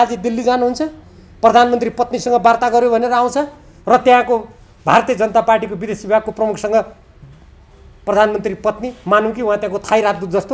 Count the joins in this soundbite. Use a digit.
0